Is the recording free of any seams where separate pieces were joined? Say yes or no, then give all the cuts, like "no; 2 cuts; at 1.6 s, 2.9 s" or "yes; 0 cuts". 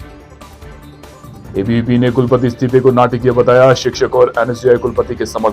yes; 0 cuts